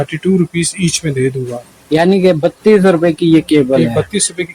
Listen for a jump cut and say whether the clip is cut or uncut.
uncut